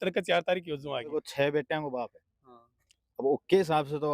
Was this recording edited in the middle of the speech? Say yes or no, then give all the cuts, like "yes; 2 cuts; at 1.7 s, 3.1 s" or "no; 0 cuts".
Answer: yes; 1 cut; at 1.1 s